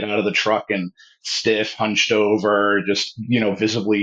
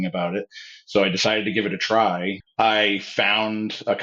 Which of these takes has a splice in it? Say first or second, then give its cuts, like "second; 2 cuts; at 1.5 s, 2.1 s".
second; 1 cut; at 2.4 s